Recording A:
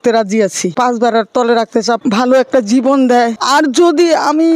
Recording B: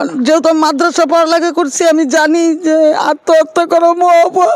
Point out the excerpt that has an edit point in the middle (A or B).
A